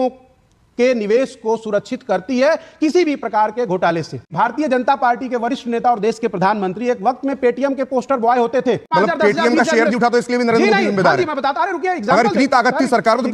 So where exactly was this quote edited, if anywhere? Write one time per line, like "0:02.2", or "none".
0:04.3
0:08.9

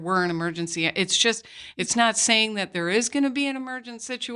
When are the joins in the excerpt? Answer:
none

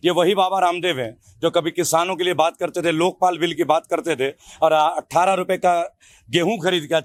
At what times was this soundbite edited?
none

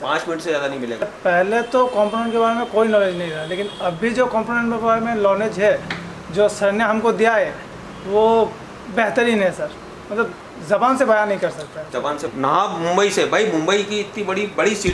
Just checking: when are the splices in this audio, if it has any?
0:01.1
0:12.2

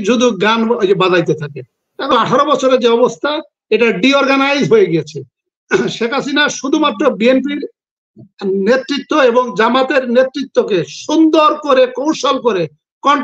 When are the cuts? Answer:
0:02.1

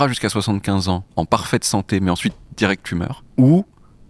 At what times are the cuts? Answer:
0:01.1
0:03.2

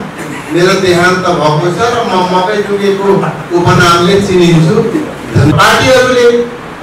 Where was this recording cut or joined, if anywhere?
0:05.5

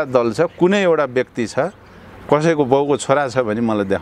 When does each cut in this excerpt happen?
none

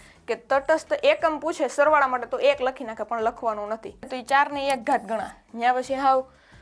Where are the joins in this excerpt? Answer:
0:04.1

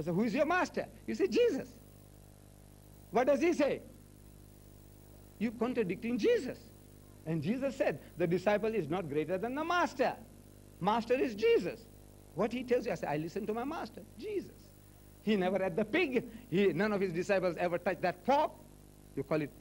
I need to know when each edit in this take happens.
0:09.1

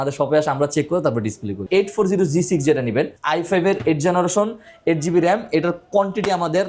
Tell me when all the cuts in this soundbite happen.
0:01.6

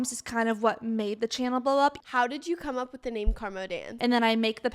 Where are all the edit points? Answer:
0:02.0
0:03.9

